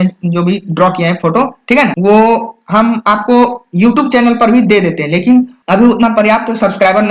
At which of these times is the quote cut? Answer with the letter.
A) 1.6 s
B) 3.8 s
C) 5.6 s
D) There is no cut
D